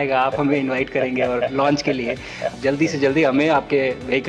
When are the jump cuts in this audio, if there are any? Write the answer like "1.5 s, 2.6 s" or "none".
2.6 s

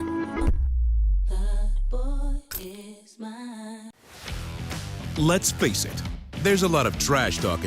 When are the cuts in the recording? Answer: 3.9 s

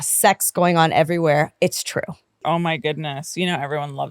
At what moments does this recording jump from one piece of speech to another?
2.4 s

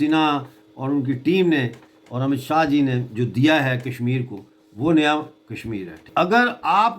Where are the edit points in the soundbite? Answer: 6.1 s

